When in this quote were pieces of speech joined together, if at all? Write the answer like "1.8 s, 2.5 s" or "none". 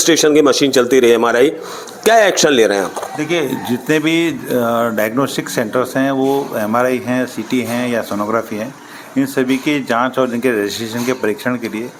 none